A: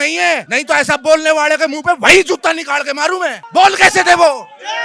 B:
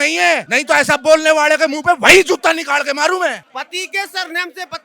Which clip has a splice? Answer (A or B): B